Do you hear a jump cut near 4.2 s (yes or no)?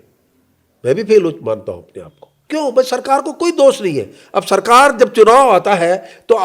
no